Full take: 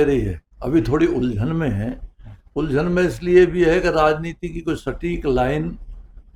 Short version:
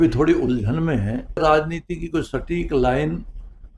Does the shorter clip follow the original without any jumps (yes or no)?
no